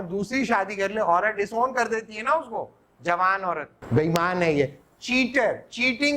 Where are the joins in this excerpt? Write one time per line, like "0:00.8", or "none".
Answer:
0:03.8